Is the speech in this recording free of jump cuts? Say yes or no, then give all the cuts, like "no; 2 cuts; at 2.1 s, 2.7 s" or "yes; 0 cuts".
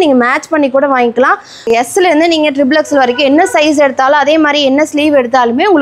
no; 1 cut; at 1.7 s